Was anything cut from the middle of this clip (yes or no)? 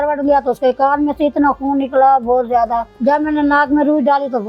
no